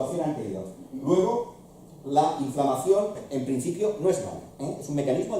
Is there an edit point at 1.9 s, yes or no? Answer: yes